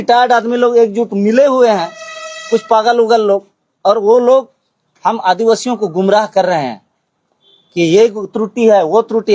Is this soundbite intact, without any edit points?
yes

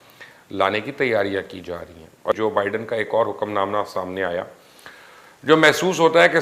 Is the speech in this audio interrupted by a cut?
yes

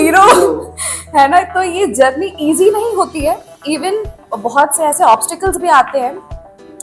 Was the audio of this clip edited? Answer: no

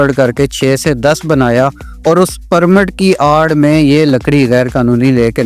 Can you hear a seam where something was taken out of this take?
no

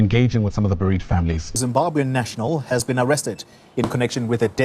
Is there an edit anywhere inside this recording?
yes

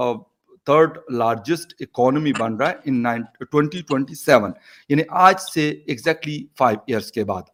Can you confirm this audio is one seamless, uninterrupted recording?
yes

